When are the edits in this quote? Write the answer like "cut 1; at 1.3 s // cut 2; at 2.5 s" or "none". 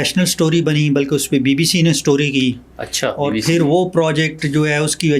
none